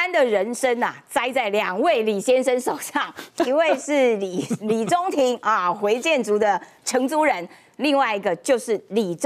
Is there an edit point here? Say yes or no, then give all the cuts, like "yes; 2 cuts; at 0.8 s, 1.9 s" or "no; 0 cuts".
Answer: no; 0 cuts